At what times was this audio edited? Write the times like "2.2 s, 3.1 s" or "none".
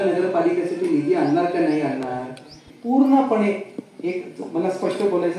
2.7 s